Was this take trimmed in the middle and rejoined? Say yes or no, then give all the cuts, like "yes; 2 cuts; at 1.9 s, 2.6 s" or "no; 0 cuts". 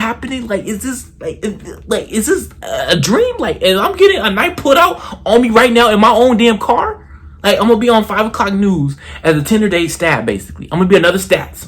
yes; 1 cut; at 1.4 s